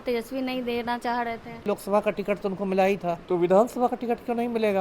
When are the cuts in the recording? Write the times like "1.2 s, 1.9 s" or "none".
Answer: 1.6 s, 3.2 s

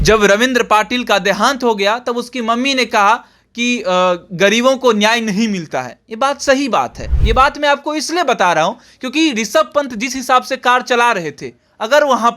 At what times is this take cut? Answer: 7.1 s

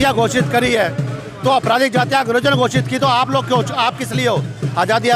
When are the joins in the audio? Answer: none

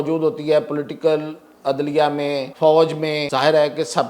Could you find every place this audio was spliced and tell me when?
2.5 s, 3.2 s

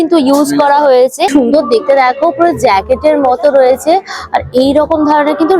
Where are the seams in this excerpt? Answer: 1.3 s

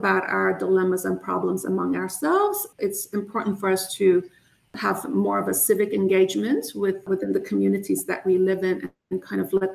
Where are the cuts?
2.7 s

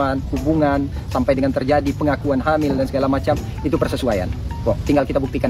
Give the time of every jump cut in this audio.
none

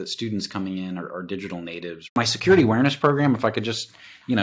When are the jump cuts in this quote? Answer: 2.1 s

